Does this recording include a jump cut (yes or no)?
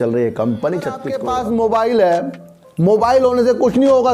yes